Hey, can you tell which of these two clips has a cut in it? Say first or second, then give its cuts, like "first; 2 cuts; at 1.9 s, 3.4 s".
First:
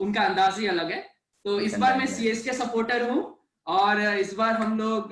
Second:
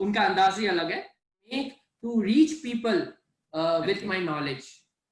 second; 1 cut; at 1.5 s